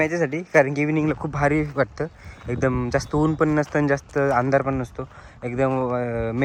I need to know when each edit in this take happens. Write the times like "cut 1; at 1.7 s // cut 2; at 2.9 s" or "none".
none